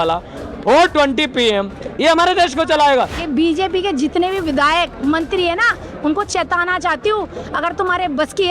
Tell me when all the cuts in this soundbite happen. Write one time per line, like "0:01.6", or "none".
0:03.2

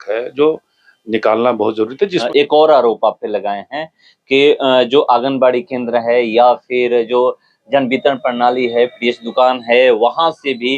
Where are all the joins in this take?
0:02.2

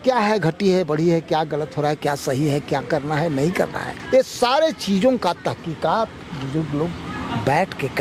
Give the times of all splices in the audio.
none

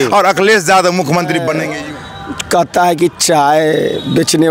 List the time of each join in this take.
0:01.7

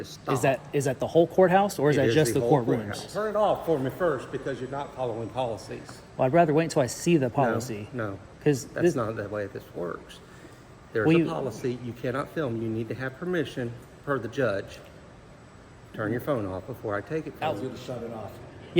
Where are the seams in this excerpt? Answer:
0:03.1
0:17.3

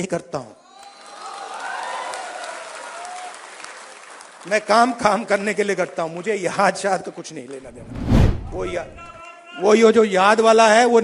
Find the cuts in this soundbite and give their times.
none

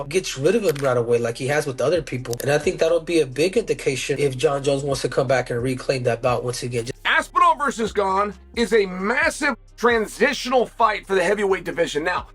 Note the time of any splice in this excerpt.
0:07.0

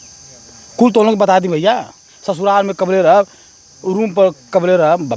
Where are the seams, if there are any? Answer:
none

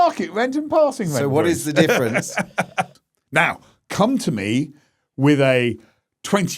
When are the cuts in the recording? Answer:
0:02.9

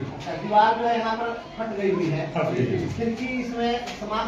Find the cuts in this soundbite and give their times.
none

